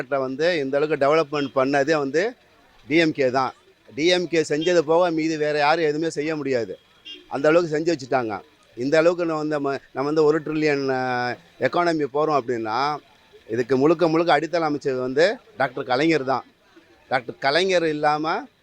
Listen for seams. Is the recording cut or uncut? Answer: uncut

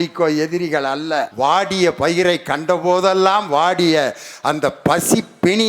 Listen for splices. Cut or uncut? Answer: cut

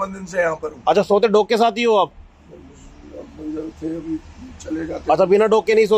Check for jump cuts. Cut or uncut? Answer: uncut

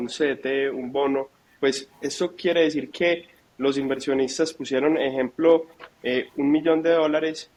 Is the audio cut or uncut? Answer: uncut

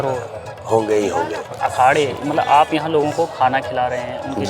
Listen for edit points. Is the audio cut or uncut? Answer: cut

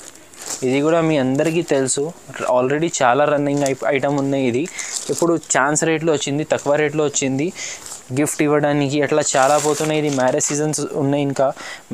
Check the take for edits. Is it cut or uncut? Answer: uncut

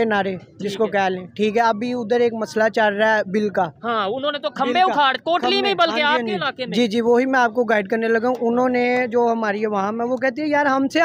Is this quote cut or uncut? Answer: uncut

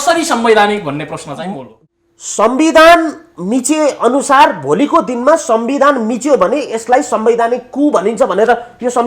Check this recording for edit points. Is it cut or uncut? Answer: cut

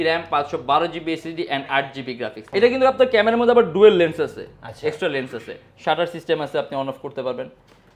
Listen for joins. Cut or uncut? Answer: cut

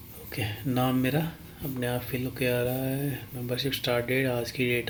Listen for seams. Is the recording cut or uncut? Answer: uncut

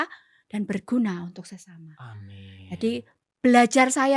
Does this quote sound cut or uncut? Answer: uncut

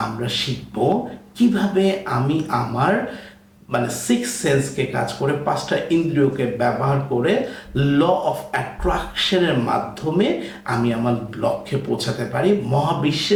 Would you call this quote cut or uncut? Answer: uncut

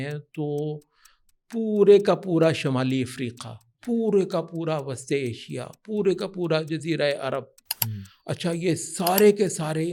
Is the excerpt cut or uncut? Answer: uncut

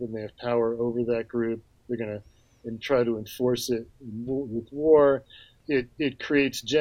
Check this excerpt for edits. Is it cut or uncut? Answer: cut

